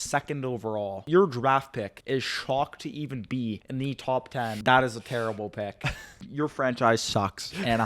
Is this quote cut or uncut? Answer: cut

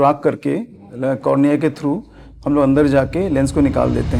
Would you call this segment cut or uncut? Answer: uncut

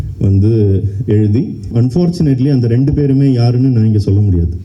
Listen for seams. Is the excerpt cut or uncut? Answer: cut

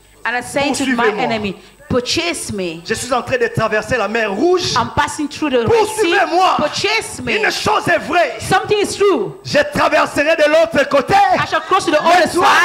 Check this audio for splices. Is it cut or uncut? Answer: uncut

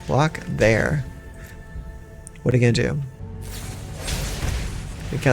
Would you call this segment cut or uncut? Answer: cut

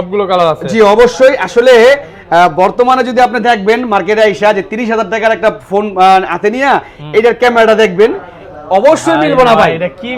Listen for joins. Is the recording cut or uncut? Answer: uncut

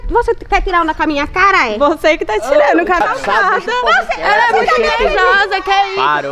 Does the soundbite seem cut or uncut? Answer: cut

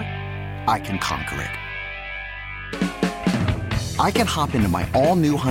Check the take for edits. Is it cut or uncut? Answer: uncut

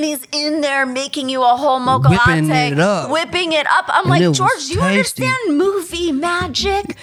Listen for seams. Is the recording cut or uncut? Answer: uncut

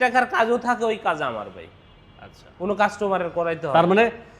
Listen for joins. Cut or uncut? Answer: uncut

